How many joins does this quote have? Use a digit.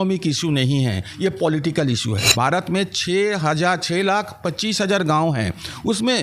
1